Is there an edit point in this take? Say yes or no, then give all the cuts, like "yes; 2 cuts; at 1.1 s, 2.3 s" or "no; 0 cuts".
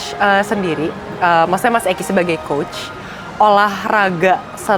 no; 0 cuts